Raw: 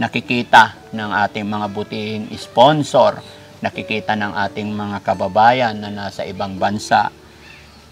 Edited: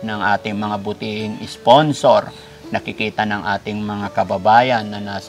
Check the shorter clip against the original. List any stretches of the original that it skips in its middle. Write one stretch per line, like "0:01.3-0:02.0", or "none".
none